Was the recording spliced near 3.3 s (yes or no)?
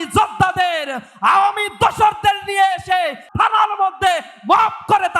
yes